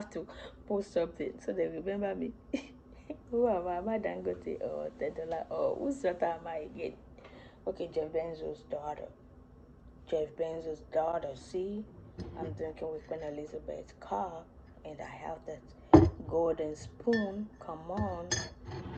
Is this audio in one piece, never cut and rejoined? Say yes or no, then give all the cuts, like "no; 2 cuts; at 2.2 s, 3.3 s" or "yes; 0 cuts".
yes; 0 cuts